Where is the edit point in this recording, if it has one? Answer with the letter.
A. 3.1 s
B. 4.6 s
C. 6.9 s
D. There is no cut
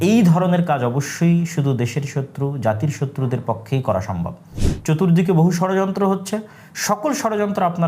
B